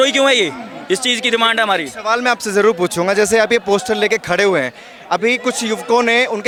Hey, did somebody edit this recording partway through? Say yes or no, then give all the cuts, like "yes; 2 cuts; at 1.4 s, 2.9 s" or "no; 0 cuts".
no; 0 cuts